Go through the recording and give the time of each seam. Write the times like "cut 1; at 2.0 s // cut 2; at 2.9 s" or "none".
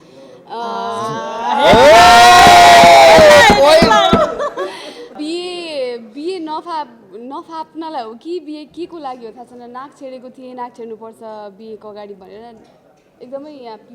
cut 1; at 5.0 s